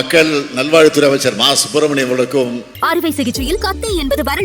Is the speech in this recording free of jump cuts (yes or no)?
no